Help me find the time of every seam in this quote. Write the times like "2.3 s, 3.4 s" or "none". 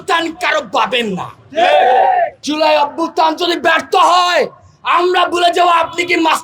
2.5 s